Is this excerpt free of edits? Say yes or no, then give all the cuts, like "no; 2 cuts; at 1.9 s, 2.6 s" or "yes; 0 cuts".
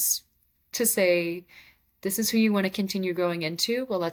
yes; 0 cuts